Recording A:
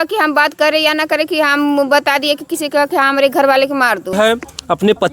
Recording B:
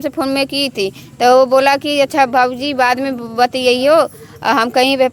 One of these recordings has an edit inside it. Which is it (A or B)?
A